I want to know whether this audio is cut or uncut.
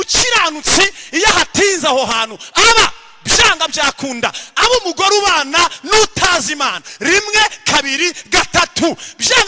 uncut